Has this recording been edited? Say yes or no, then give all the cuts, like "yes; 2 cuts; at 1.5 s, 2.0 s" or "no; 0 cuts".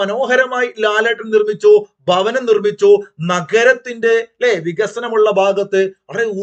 no; 0 cuts